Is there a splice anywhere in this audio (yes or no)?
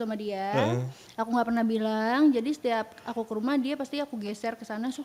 no